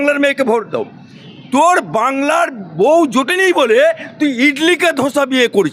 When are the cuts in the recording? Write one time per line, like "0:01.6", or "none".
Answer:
none